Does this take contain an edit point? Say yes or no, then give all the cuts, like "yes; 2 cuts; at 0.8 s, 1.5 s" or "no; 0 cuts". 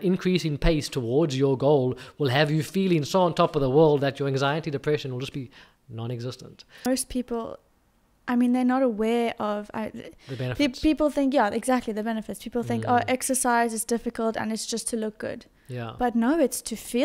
yes; 1 cut; at 6.9 s